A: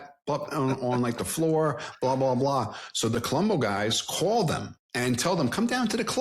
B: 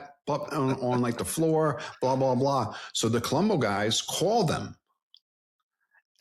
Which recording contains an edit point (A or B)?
A